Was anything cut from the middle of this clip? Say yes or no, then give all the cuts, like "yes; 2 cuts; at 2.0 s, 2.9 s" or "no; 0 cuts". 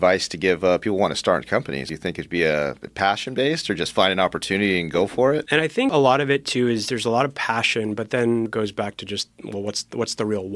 yes; 3 cuts; at 1.9 s, 5.6 s, 8.5 s